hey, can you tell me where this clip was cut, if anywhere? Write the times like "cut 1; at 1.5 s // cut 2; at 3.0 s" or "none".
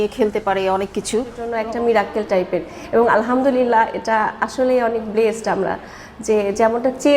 cut 1; at 1.5 s